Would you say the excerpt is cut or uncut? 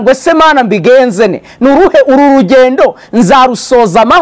uncut